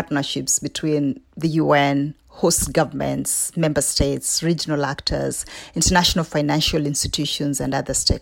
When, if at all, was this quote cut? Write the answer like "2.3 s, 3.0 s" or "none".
none